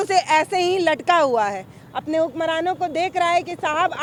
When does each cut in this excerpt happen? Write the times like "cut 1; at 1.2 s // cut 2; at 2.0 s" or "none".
none